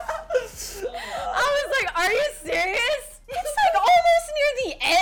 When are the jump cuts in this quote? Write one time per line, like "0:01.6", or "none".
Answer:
0:03.1